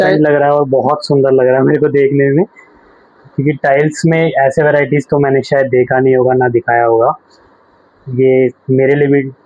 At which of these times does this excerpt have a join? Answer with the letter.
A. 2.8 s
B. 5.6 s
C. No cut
C